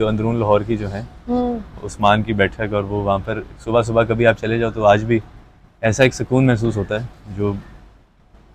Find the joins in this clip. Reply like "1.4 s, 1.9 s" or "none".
none